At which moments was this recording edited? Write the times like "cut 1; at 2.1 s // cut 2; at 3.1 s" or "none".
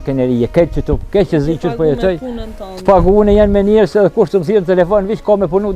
none